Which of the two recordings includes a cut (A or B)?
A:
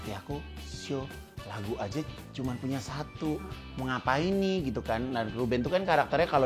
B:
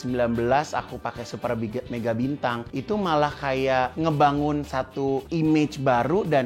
B